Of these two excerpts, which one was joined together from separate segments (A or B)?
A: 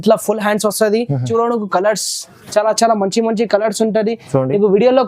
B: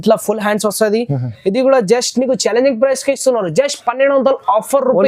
A